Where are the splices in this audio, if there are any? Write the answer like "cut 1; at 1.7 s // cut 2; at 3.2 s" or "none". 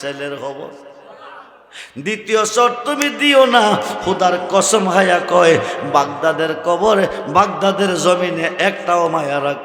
none